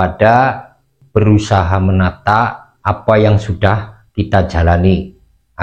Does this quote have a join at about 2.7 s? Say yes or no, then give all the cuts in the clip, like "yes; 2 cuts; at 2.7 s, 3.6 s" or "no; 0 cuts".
yes; 1 cut; at 2.7 s